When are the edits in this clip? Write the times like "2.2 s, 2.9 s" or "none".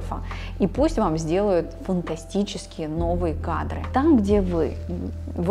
none